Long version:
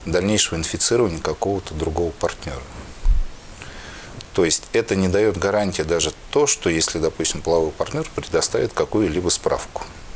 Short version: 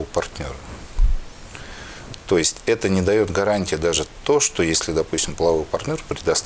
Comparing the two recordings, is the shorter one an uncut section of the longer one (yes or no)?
yes